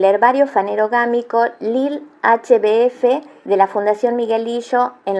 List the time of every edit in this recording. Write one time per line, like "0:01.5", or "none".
none

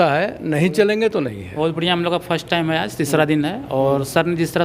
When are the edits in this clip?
0:01.5

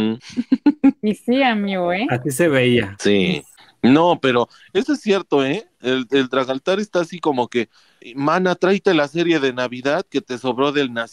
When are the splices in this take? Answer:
0:03.5

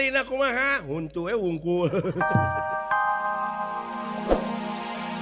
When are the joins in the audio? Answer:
0:02.4

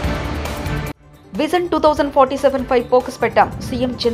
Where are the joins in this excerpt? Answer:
0:01.1

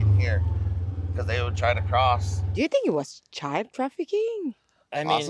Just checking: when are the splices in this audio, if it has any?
0:02.4

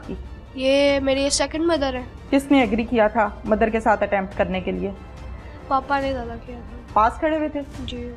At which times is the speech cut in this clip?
0:02.1

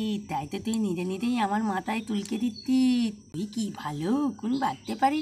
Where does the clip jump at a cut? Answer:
0:03.4

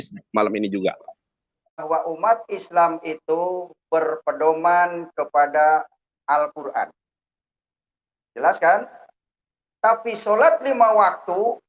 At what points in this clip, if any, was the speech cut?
0:01.8

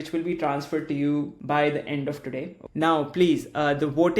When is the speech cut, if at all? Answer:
0:01.4
0:02.6

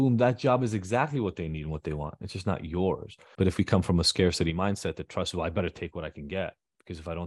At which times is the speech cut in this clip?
0:03.2

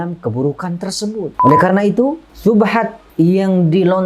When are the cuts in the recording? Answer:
0:01.4
0:02.3
0:03.0

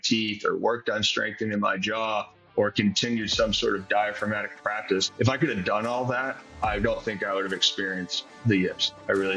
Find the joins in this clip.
0:05.1
0:06.5
0:08.4

